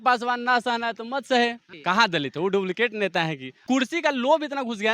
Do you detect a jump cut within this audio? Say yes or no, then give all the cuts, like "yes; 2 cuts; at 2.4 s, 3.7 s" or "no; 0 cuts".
yes; 2 cuts; at 1.7 s, 3.5 s